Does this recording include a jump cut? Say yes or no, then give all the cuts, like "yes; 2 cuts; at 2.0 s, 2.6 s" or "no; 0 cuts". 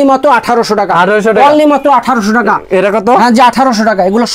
no; 0 cuts